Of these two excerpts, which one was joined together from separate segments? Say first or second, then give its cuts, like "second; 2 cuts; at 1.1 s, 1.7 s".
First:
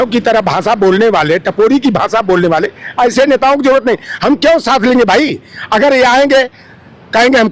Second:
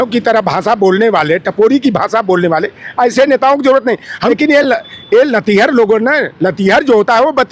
second; 1 cut; at 4.3 s